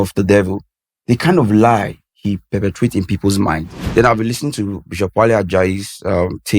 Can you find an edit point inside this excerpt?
yes; 1 cut; at 3.8 s

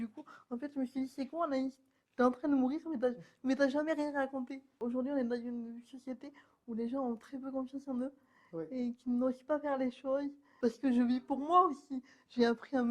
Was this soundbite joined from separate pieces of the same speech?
yes; 2 cuts; at 4.8 s, 10.4 s

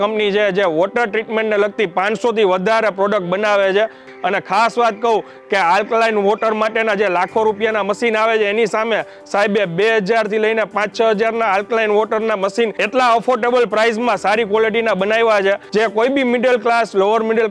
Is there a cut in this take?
yes; 2 cuts; at 4.1 s, 15.6 s

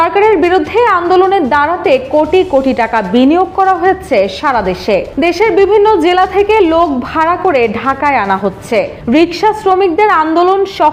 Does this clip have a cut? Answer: no; 0 cuts

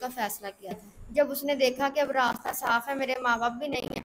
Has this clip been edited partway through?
yes; 1 cut; at 0.9 s

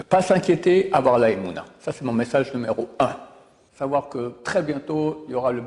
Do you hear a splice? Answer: yes; 1 cut; at 3.6 s

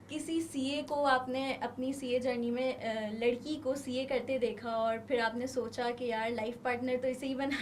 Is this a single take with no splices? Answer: yes; 0 cuts

